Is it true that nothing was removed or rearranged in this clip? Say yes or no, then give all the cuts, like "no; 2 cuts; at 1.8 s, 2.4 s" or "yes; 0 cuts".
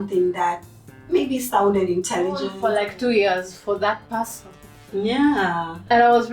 no; 1 cut; at 2.5 s